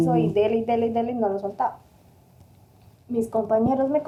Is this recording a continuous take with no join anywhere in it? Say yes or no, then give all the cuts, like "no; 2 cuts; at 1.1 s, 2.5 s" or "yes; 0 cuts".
yes; 0 cuts